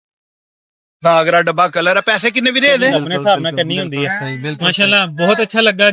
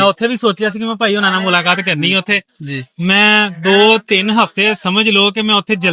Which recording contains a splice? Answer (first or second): first